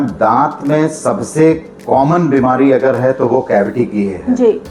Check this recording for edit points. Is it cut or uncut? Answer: uncut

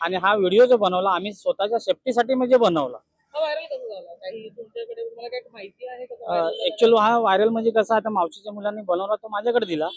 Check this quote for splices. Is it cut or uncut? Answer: uncut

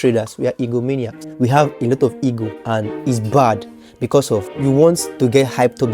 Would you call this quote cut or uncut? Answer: cut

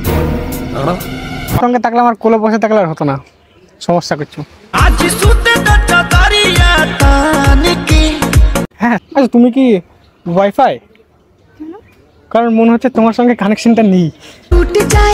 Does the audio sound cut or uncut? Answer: cut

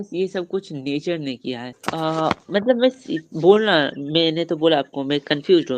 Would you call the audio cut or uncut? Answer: cut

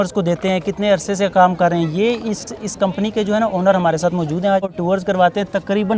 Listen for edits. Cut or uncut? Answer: cut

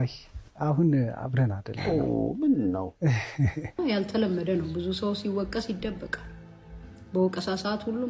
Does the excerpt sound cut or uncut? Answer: cut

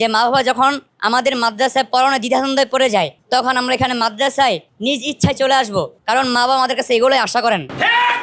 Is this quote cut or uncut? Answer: uncut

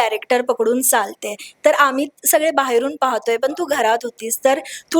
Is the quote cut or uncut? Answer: uncut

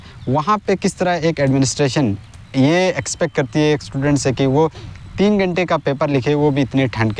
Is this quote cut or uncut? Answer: uncut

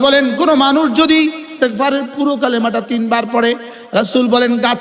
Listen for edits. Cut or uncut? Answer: cut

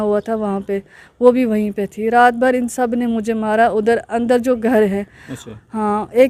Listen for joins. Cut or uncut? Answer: uncut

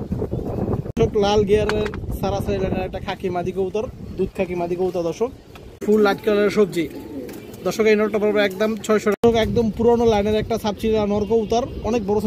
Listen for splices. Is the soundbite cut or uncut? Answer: cut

